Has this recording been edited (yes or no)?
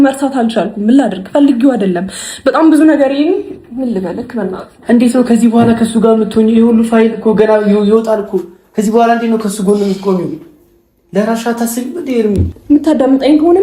yes